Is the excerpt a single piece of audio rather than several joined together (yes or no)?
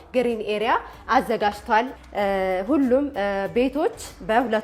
no